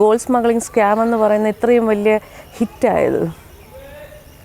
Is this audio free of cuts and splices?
yes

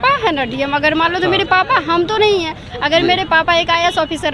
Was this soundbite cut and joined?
no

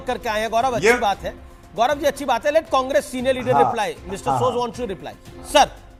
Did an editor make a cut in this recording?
no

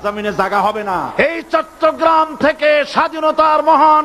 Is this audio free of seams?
no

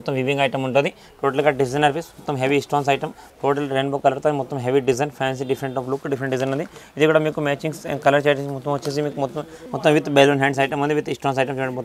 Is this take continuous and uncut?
no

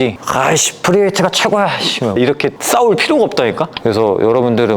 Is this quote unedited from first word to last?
no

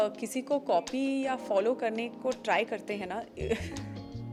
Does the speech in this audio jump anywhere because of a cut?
no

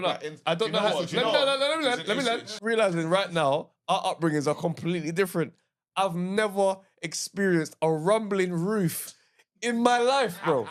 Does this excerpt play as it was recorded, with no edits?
no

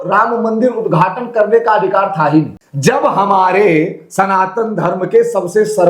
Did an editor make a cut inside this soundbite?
yes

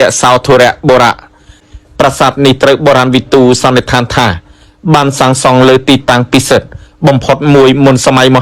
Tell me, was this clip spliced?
yes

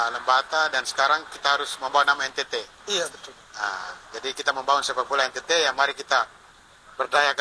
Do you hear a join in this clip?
no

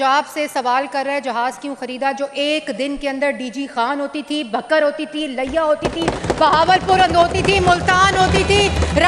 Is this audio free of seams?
yes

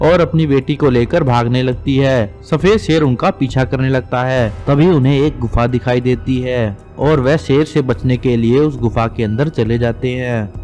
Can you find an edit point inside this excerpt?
no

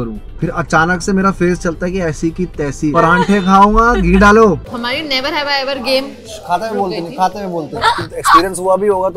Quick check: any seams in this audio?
yes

